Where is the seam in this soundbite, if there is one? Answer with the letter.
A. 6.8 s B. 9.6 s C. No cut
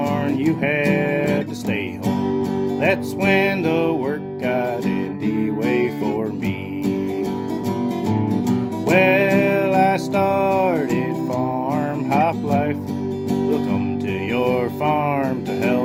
C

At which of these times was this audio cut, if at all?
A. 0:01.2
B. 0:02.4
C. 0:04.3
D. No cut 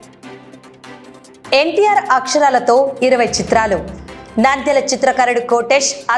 A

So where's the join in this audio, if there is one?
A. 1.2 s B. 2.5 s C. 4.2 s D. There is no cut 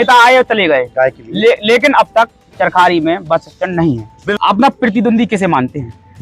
C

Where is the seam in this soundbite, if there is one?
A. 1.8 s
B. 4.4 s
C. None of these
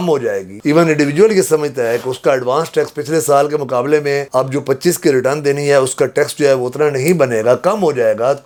C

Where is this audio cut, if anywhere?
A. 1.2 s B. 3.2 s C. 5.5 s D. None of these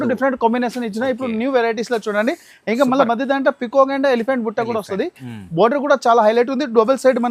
D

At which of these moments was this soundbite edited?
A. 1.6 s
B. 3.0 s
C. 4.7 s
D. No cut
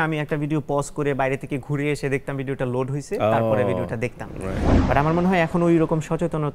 C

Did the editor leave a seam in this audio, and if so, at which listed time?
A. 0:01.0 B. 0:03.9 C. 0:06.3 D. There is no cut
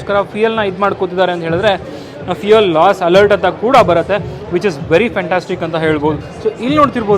C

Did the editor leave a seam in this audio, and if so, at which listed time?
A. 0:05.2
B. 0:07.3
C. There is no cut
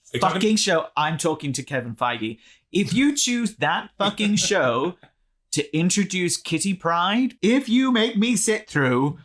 B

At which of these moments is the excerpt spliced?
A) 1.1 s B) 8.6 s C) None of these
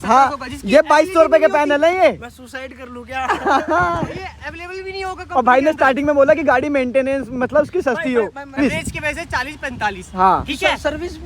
B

